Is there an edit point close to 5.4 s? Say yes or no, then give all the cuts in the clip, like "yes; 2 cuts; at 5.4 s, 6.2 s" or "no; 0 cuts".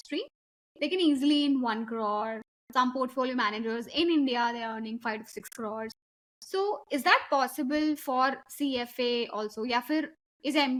no; 0 cuts